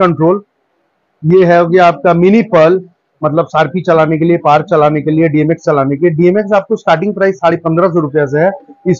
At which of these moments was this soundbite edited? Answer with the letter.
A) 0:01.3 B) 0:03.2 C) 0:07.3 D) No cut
D